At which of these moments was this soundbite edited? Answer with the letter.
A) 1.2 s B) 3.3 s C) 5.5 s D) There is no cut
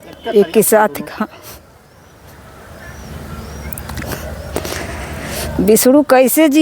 D